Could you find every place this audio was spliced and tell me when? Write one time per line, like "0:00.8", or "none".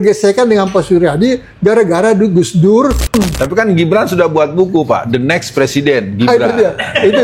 0:03.1